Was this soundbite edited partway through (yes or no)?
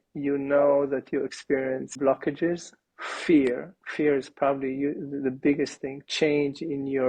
no